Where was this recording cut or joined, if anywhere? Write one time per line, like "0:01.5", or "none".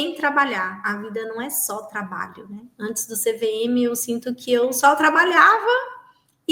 none